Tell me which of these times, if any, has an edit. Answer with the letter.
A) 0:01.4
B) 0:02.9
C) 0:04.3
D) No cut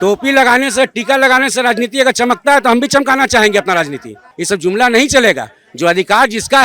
C